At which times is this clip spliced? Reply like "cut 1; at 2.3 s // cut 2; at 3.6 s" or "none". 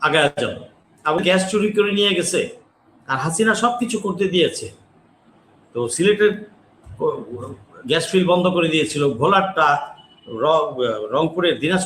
cut 1; at 1.2 s